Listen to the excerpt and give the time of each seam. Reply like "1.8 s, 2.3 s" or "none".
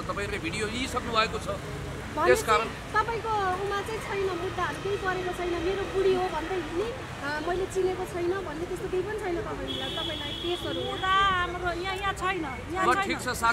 none

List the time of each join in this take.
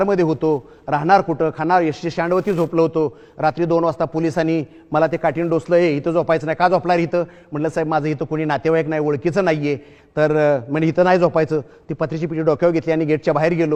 none

